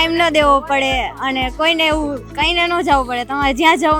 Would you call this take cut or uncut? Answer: uncut